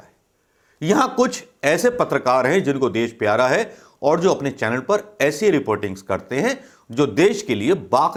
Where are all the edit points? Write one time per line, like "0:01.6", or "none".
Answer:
none